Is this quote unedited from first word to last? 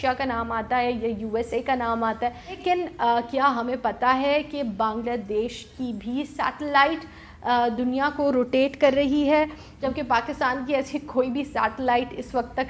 no; 2 cuts; at 2.6 s, 9.7 s

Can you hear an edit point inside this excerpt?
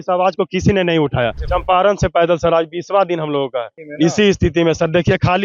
yes; 2 cuts; at 1.4 s, 3.8 s

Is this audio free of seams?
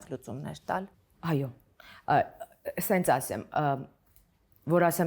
yes; 0 cuts

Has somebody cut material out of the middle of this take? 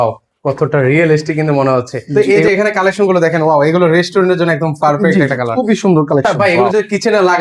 yes; 2 cuts; at 2.2 s, 6.4 s

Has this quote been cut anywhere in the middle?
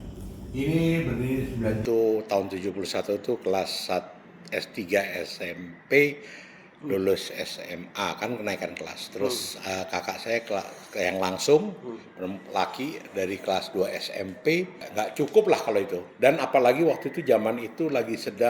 yes; 2 cuts; at 1.8 s, 14.8 s

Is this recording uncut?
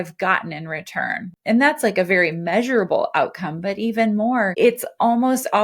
no; 1 cut; at 1.2 s

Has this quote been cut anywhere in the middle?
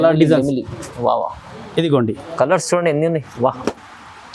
no; 0 cuts

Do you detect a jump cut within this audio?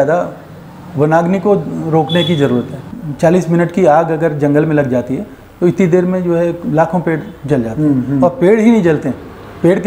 yes; 1 cut; at 2.8 s

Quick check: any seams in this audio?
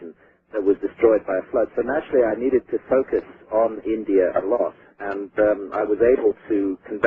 yes; 1 cut; at 5.5 s

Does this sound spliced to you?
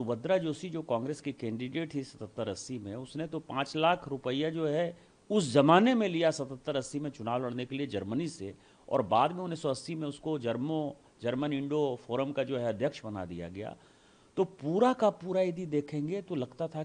no; 0 cuts

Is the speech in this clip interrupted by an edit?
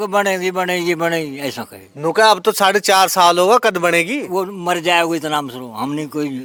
no; 0 cuts

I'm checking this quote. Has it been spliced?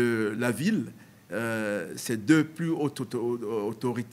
no; 0 cuts

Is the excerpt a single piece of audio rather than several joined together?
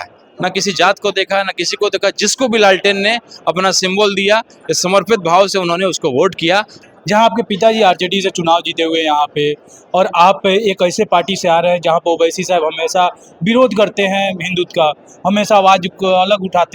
no; 1 cut; at 6.7 s

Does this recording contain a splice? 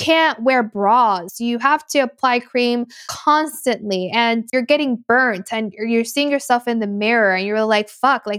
yes; 3 cuts; at 1.2 s, 3.0 s, 4.5 s

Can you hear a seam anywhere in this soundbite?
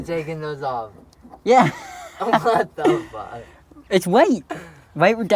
no; 0 cuts

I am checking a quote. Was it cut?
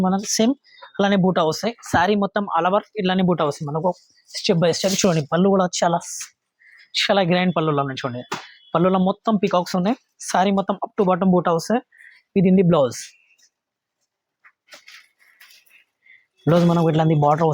no; 0 cuts

